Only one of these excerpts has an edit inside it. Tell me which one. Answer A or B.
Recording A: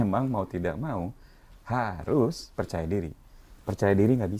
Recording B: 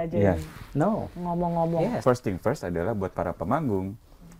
B